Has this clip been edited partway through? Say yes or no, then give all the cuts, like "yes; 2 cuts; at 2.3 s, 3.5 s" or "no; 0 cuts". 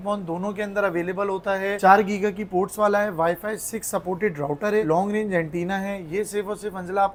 no; 0 cuts